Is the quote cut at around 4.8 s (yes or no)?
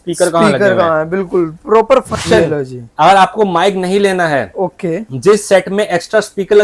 no